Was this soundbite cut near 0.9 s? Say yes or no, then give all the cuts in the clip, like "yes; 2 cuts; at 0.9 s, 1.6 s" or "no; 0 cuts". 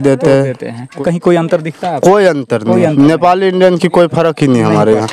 yes; 1 cut; at 0.9 s